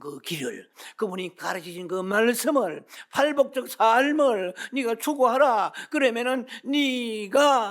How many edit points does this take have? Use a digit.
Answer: 0